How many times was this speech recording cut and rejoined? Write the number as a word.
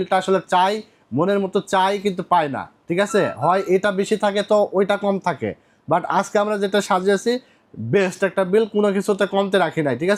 zero